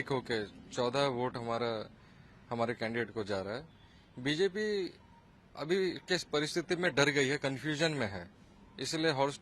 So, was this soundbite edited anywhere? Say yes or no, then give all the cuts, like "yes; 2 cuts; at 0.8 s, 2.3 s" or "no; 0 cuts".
no; 0 cuts